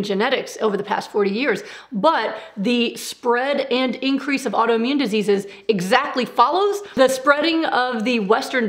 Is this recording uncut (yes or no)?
no